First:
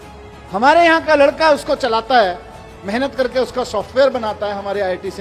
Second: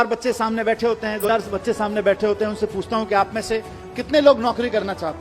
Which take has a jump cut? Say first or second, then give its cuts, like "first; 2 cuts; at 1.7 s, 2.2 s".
second; 1 cut; at 1.3 s